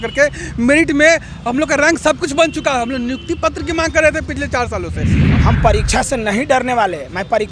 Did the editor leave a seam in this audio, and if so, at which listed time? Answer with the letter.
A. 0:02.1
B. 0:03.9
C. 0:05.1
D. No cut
C